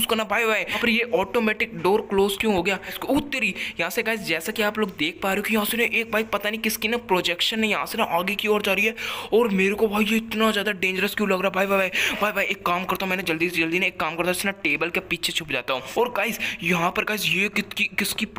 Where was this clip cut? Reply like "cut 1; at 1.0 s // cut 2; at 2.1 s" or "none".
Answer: cut 1; at 0.8 s // cut 2; at 2.9 s // cut 3; at 15.9 s